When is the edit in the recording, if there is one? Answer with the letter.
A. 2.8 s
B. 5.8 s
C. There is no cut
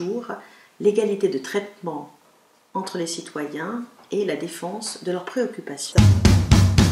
B